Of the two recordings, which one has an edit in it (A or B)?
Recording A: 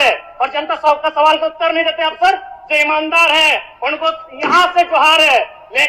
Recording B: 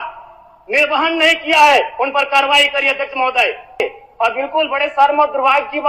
B